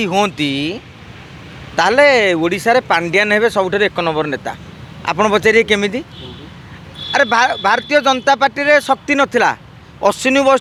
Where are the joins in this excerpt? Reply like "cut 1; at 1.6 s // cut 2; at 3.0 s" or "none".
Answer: none